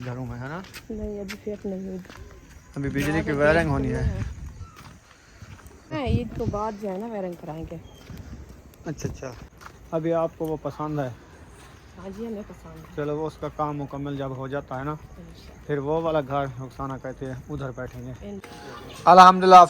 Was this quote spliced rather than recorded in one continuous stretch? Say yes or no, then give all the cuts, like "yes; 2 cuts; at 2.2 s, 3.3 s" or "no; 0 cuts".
yes; 3 cuts; at 5.9 s, 9.4 s, 18.5 s